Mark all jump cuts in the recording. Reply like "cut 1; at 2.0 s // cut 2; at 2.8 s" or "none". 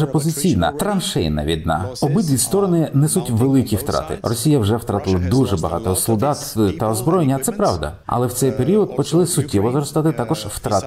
none